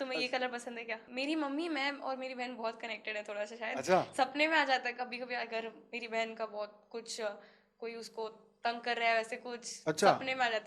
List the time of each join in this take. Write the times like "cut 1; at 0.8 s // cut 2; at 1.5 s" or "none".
cut 1; at 1.0 s